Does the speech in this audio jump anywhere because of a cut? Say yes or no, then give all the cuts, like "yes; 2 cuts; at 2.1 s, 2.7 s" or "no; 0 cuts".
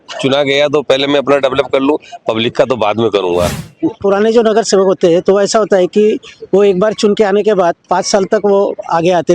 yes; 1 cut; at 4.0 s